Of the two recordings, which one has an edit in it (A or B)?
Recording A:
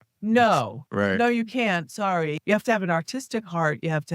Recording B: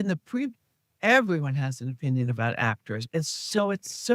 A